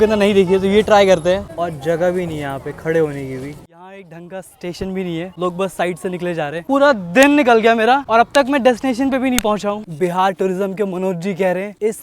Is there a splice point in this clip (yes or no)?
yes